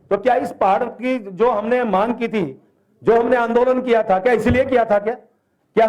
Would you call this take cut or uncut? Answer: uncut